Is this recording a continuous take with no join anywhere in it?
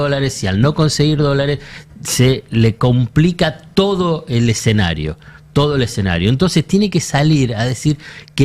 yes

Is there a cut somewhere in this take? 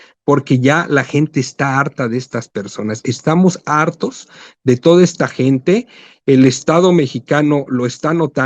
no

